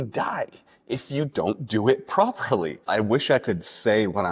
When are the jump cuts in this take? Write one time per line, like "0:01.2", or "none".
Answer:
0:02.8